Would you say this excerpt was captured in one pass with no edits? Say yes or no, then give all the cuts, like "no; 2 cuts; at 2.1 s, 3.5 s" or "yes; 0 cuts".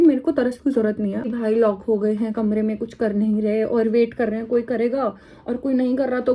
no; 1 cut; at 1.3 s